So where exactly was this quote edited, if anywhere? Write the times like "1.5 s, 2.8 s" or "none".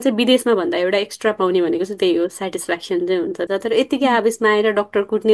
3.5 s